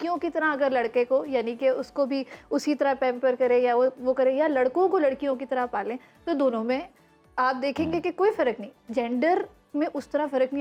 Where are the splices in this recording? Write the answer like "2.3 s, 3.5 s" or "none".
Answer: none